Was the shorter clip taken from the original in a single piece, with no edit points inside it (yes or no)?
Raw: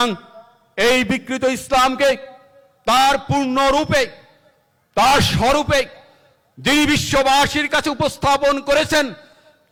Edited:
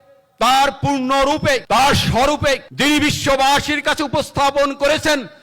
no